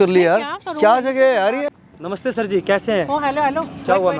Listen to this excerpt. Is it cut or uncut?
cut